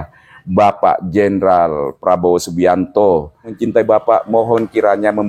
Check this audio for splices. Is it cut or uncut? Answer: cut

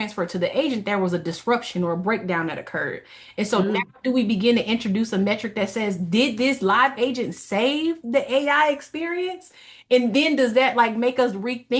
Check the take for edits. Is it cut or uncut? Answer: uncut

